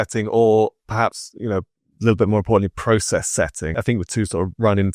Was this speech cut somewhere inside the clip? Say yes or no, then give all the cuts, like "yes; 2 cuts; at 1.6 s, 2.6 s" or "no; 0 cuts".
yes; 1 cut; at 3.8 s